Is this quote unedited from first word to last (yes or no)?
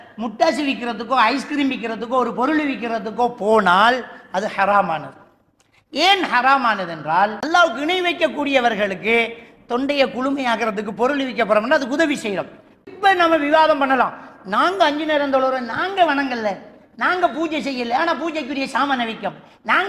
no